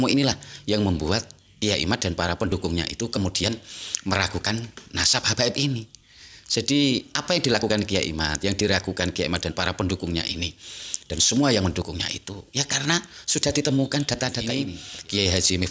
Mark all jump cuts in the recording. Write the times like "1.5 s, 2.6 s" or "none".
14.6 s